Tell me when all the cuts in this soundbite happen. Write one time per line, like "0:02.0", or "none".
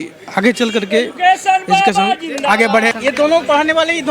0:02.9

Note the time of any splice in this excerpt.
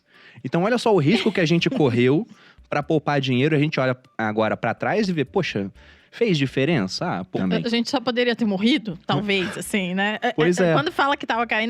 0:07.3

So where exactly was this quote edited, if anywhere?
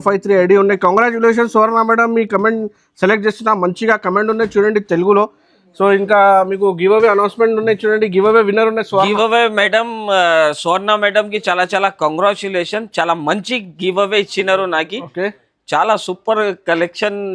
none

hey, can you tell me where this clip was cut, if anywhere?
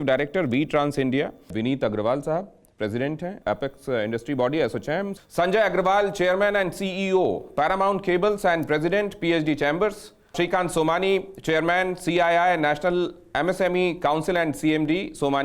0:01.5

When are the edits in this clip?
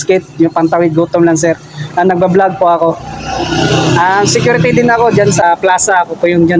0:05.4

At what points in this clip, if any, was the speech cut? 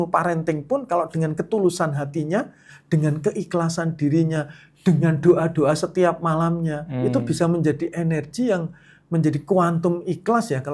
0:02.6

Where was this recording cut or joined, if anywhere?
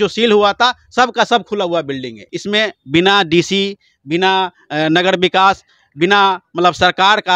0:02.3

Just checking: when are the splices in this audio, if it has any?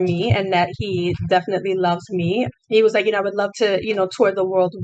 0:02.6

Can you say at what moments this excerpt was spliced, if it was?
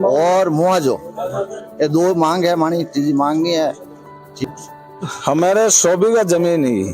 0:04.4

